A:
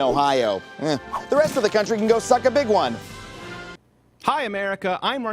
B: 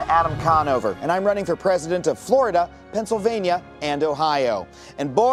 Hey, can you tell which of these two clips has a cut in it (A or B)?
A